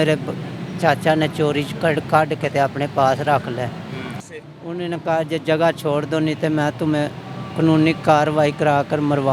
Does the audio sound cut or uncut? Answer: cut